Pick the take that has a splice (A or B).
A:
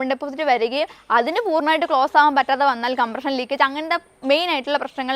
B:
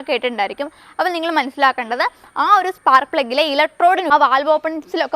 B